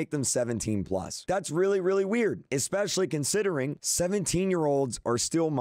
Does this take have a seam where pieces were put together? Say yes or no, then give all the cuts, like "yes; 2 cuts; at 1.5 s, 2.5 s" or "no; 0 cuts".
no; 0 cuts